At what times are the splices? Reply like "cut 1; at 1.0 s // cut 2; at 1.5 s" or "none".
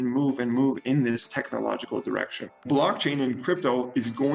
cut 1; at 2.7 s